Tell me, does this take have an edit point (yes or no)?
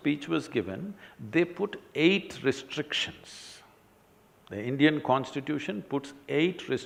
no